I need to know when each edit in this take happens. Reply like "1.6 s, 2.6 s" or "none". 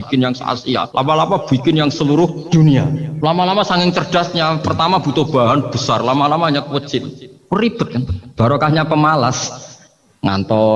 0.9 s, 2.4 s, 3.1 s